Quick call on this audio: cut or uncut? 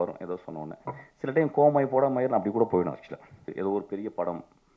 cut